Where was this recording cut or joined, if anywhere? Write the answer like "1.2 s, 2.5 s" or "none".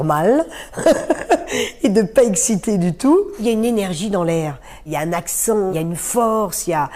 3.4 s, 4.8 s, 5.7 s